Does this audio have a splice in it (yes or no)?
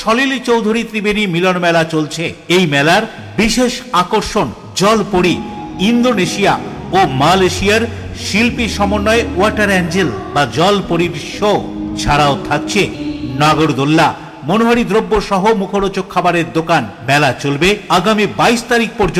no